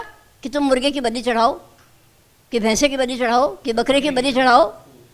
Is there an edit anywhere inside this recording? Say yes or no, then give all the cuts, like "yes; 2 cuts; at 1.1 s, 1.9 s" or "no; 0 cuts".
no; 0 cuts